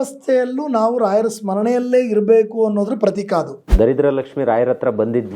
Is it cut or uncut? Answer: cut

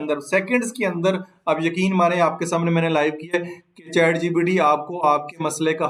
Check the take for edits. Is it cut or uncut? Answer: uncut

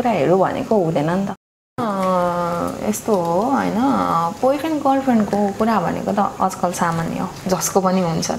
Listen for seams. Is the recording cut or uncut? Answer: cut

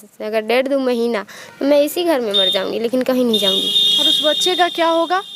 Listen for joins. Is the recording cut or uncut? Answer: uncut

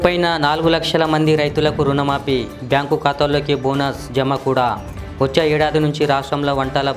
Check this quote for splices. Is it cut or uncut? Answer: uncut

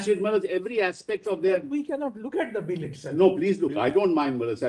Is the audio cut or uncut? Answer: uncut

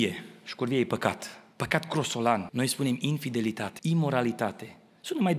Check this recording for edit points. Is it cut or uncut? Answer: cut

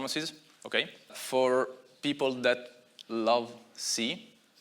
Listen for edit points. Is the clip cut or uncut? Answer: cut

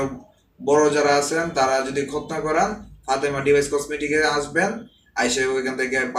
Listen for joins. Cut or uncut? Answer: uncut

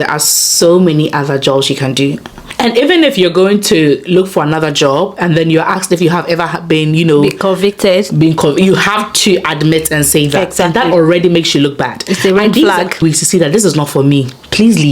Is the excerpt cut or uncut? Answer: cut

